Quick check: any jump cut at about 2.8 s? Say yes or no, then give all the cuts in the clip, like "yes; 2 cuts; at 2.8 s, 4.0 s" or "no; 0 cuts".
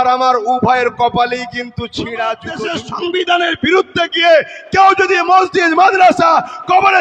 yes; 1 cut; at 2.8 s